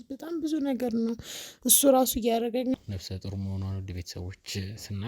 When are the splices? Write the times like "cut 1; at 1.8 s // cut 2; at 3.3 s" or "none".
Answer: cut 1; at 2.7 s